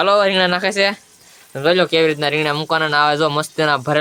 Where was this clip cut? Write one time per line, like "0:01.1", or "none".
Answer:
none